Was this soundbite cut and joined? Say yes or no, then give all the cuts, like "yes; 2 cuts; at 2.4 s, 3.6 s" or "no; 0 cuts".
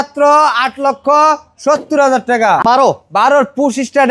yes; 1 cut; at 2.6 s